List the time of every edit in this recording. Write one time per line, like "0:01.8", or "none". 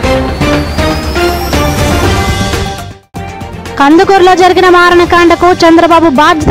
0:02.9